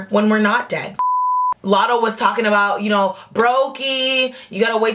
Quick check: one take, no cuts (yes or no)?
no